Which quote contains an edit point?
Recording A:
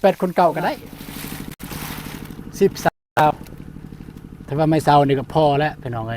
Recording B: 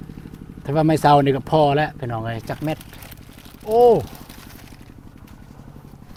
A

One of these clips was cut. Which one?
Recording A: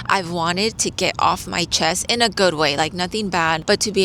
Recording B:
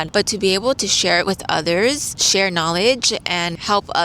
B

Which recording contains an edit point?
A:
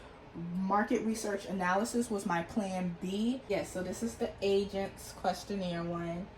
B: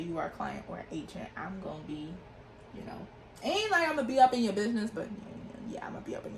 A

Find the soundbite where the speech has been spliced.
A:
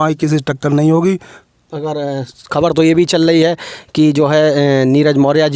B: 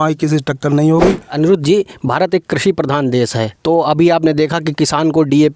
B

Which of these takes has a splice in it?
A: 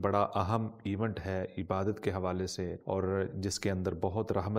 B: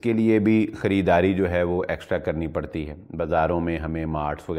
A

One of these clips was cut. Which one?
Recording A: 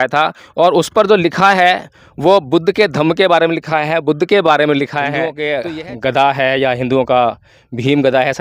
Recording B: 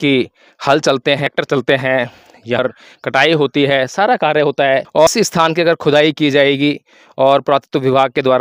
A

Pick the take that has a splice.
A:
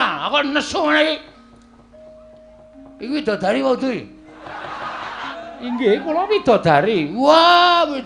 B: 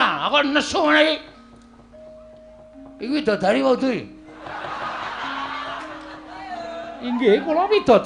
A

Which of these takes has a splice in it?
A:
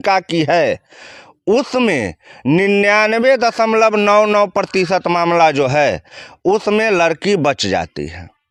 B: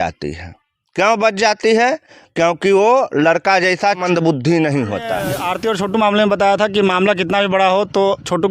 B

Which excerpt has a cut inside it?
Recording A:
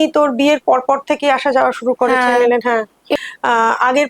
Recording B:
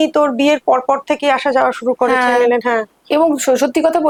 A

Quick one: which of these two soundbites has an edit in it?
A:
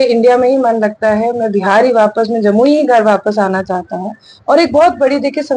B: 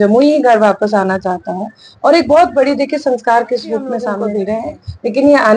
B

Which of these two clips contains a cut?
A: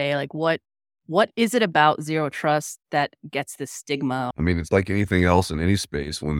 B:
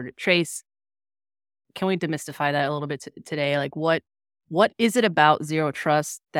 A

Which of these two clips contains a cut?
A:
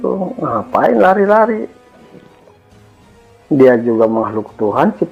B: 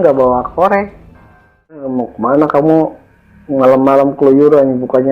B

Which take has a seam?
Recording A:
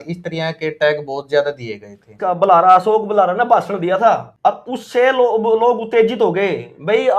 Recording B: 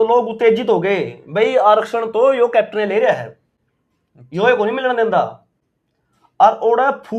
A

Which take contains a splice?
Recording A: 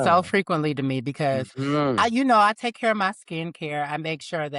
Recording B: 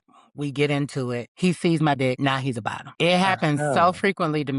B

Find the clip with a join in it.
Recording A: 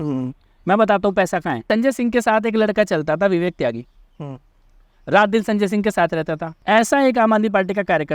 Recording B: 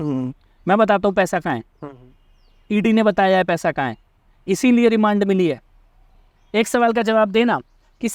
A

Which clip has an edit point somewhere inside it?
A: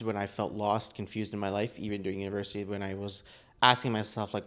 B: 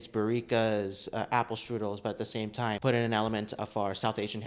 B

